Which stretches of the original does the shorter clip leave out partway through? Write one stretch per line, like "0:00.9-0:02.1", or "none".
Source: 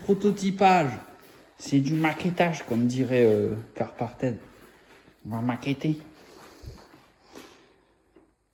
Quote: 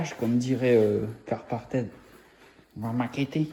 none